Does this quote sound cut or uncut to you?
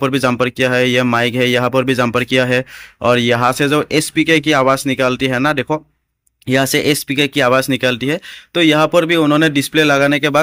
uncut